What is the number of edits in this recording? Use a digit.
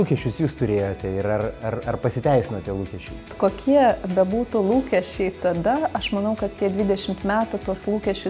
1